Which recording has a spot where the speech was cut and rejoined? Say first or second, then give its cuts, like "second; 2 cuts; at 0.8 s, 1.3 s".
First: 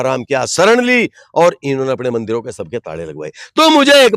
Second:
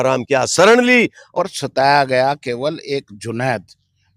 second; 1 cut; at 1.2 s